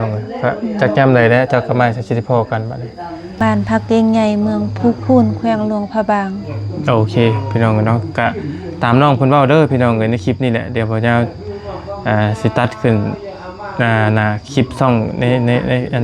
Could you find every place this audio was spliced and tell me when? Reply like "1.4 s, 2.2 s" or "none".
3.4 s